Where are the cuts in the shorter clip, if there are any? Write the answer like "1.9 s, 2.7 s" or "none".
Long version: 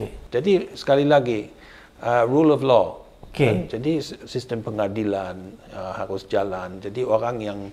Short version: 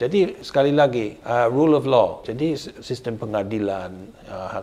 1.1 s, 2.3 s